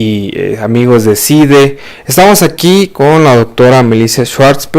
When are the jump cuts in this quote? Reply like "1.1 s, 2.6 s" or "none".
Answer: 1.3 s